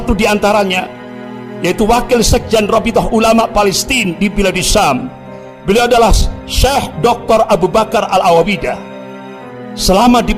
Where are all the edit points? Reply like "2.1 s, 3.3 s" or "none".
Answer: none